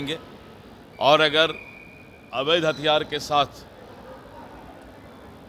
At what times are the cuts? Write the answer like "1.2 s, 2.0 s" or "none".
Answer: none